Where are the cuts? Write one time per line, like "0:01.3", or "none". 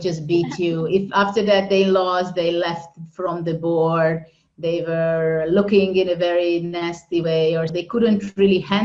0:07.8